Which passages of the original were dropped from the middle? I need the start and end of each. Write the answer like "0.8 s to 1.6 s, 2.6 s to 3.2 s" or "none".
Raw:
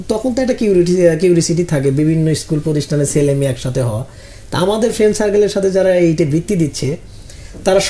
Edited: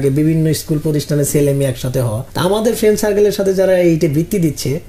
4.0 s to 4.4 s